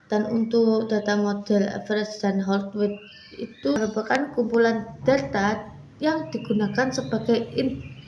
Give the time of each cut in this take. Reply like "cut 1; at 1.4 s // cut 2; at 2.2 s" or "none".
cut 1; at 3.8 s